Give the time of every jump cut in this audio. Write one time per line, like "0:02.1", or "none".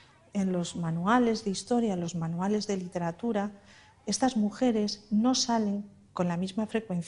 none